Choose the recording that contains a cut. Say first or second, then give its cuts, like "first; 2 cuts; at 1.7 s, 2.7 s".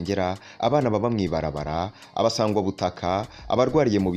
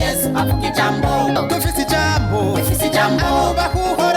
second; 1 cut; at 1.4 s